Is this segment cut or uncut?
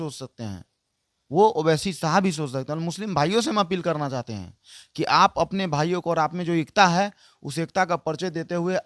uncut